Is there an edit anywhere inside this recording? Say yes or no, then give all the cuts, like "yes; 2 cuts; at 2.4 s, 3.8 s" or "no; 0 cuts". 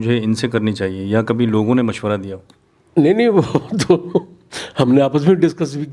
no; 0 cuts